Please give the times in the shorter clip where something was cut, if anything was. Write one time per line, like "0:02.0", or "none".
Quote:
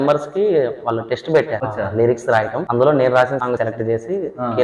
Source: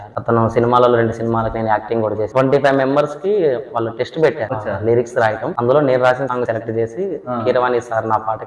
none